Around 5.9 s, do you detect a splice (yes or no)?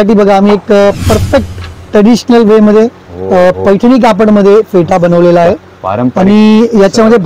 no